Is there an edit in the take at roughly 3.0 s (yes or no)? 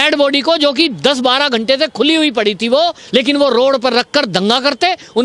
yes